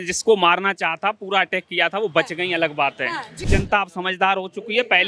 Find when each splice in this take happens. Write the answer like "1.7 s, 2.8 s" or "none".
3.5 s